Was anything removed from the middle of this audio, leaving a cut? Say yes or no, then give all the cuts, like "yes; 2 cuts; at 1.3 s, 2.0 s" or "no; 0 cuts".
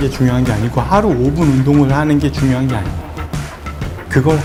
no; 0 cuts